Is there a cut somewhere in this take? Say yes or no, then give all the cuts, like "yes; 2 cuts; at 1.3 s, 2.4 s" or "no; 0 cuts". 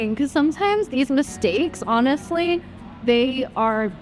no; 0 cuts